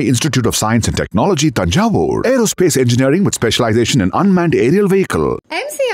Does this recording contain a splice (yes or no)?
no